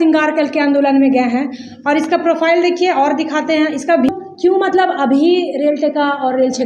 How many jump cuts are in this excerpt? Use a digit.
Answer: 1